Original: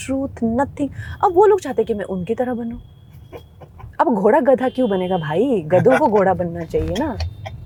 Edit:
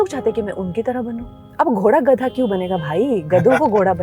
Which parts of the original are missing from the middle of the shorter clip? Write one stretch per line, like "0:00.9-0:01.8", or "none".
0:02.9-0:03.8